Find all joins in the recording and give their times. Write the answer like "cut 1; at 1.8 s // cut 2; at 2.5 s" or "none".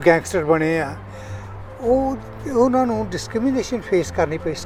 none